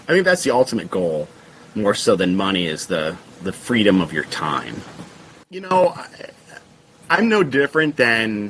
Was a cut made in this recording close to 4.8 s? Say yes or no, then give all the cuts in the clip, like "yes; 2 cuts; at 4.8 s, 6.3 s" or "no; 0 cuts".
yes; 1 cut; at 4.8 s